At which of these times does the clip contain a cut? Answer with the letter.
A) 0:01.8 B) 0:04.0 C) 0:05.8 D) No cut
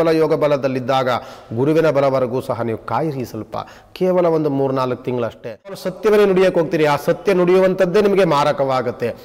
C